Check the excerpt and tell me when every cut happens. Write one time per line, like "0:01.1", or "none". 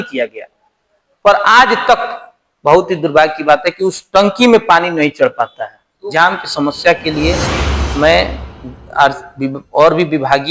0:06.0